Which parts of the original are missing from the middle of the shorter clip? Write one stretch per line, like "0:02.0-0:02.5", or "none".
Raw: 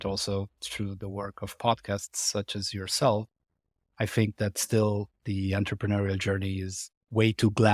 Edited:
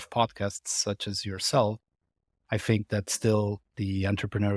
none